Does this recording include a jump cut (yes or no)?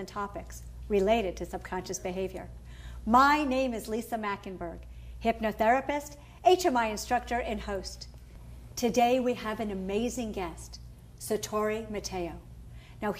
no